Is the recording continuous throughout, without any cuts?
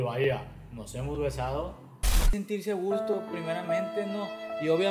no; 1 cut; at 2.3 s

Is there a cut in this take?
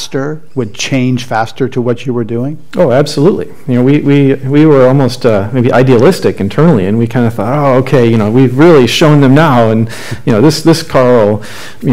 no; 0 cuts

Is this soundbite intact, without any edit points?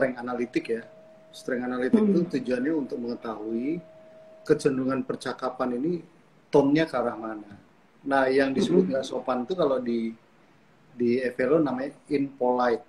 yes; 0 cuts

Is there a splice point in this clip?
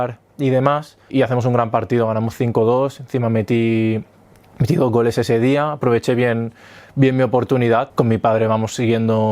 yes; 2 cuts; at 1.1 s, 7.9 s

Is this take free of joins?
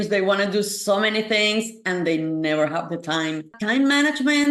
no; 1 cut; at 3.5 s

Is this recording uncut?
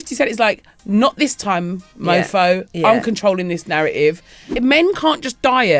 no; 1 cut; at 4.4 s

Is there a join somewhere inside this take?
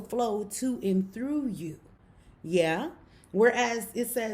no; 0 cuts

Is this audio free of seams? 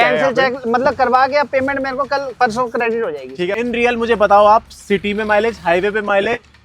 no; 1 cut; at 3.4 s

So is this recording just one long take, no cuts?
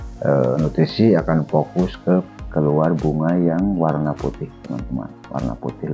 no; 1 cut; at 2.4 s

